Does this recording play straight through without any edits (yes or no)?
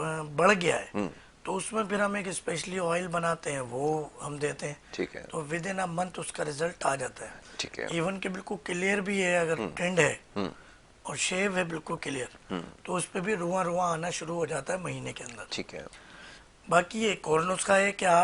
yes